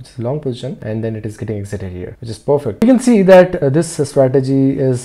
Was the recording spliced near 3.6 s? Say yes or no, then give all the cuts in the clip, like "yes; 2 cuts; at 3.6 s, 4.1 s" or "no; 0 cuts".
yes; 2 cuts; at 2.8 s, 3.6 s